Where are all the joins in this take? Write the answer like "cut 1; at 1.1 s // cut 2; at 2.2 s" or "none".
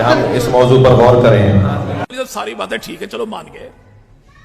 none